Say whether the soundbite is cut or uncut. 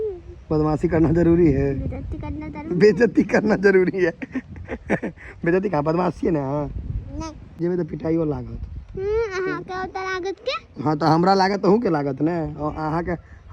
cut